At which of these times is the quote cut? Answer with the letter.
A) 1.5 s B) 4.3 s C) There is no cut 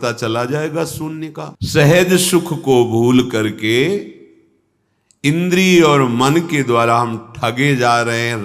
A